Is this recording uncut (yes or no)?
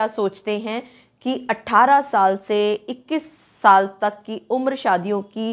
yes